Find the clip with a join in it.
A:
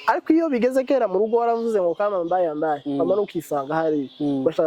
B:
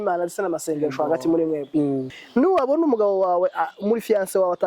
B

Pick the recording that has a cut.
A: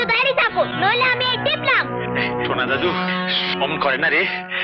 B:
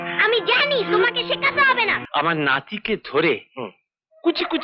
B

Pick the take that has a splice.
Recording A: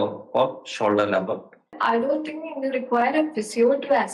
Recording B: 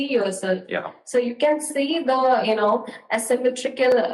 A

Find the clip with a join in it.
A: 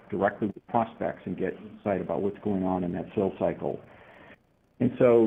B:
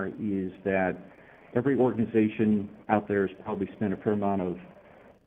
B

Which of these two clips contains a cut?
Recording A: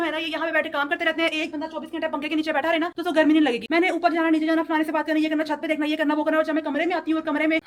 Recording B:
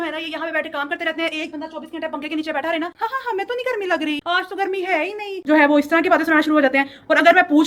B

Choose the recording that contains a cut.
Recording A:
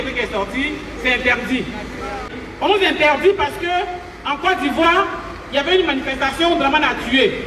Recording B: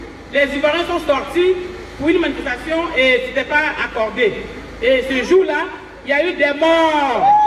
A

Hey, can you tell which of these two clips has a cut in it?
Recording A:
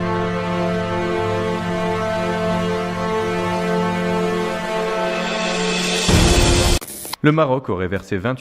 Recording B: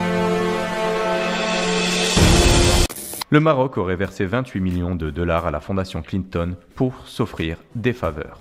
A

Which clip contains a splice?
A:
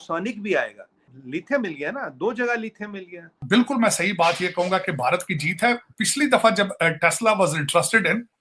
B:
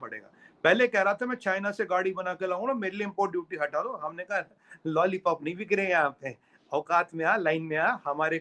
A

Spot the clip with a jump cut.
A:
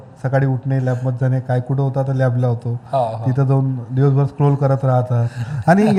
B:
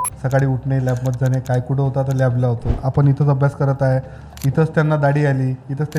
B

